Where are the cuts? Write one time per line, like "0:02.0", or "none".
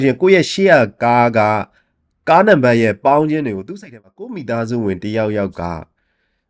0:03.8